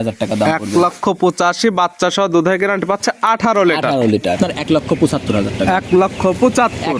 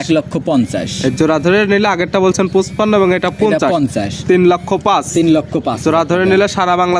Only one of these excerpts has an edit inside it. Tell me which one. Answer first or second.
first